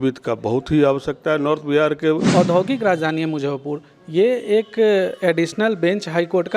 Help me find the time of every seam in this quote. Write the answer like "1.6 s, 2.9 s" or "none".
2.2 s